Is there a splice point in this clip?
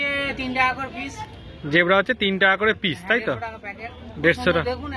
no; 0 cuts

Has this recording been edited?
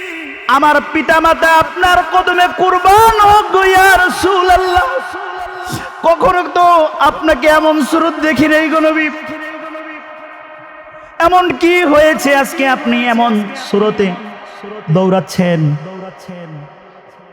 no; 0 cuts

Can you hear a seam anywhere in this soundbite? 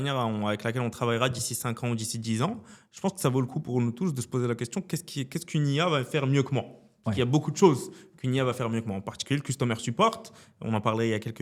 no; 0 cuts

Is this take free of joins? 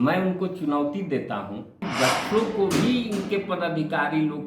no; 1 cut; at 1.8 s

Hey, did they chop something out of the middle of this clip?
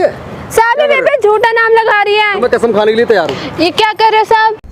yes; 1 cut; at 2.4 s

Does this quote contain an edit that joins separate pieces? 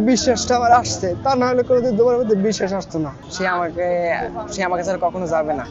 yes; 1 cut; at 3.2 s

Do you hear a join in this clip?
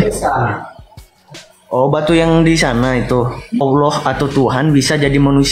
yes; 1 cut; at 3.6 s

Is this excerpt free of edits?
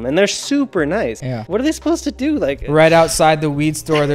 no; 2 cuts; at 1.2 s, 2.6 s

